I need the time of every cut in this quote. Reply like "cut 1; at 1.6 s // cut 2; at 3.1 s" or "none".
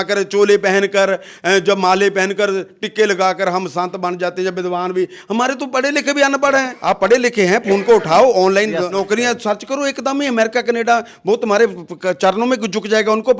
cut 1; at 6.7 s // cut 2; at 8.9 s